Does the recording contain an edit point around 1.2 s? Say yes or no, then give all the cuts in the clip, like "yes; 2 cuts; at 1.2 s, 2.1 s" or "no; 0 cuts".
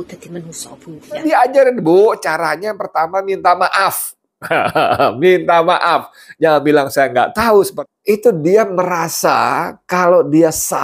yes; 2 cuts; at 1.2 s, 7.8 s